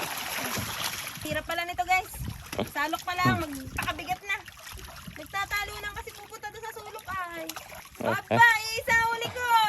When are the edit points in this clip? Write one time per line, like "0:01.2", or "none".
0:01.3
0:04.7
0:07.8